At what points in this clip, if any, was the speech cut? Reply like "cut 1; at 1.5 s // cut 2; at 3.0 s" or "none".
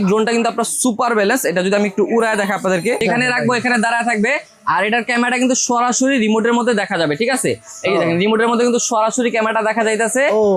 cut 1; at 3.0 s